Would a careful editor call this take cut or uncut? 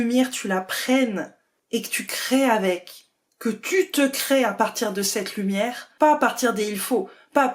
cut